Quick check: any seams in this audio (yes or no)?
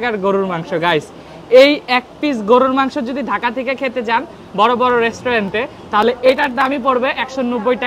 no